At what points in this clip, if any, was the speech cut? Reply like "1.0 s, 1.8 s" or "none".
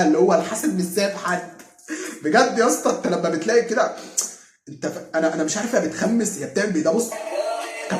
none